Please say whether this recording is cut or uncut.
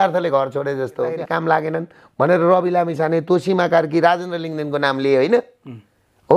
cut